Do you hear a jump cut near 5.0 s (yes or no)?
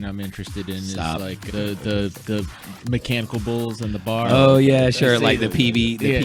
no